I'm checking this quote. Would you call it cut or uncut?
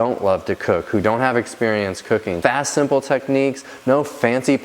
cut